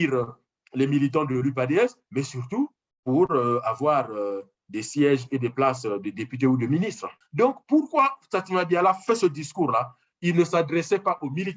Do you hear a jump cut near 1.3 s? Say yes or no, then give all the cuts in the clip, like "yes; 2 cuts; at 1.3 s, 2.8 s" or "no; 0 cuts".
no; 1 cut; at 7.0 s